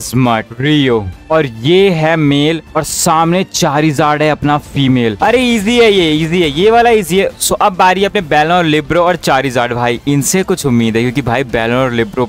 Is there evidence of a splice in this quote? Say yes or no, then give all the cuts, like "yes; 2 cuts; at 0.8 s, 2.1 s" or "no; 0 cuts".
yes; 2 cuts; at 5.2 s, 7.3 s